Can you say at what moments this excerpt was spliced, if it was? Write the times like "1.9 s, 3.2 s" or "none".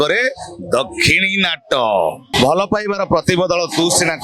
2.2 s